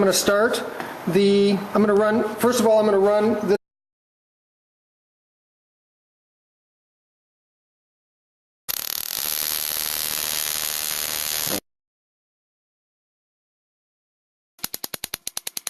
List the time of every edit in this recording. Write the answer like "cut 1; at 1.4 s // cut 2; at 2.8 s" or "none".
none